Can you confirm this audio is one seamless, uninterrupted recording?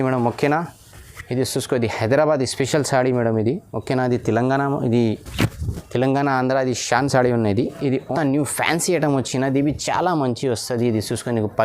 no; 1 cut; at 8.1 s

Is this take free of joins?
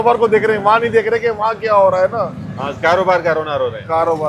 yes; 0 cuts

